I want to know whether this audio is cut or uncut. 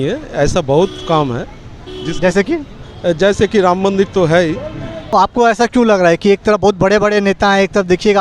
cut